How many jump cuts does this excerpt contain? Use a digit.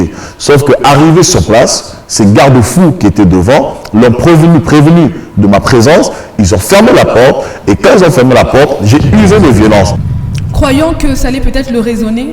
1